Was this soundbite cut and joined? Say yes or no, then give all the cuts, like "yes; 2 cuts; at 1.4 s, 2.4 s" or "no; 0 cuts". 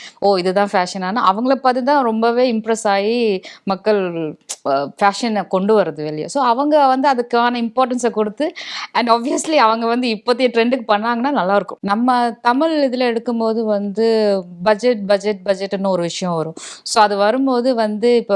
yes; 1 cut; at 11.8 s